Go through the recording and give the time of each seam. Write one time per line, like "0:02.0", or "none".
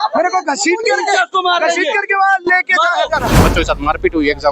0:03.5